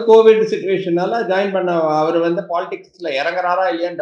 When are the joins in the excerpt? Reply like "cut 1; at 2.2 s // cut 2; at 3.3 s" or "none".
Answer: none